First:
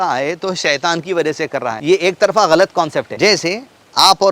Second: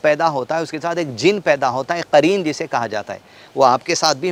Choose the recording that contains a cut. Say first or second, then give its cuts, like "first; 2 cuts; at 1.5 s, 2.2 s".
first; 2 cuts; at 1.8 s, 3.1 s